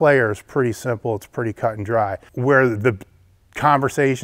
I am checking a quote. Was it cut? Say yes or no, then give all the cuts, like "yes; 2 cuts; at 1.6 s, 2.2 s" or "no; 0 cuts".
yes; 1 cut; at 2.2 s